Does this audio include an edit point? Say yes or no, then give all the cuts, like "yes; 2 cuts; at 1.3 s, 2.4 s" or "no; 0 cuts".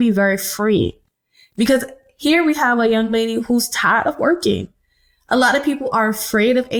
no; 0 cuts